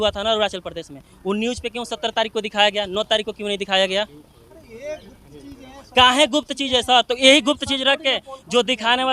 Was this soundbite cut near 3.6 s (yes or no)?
no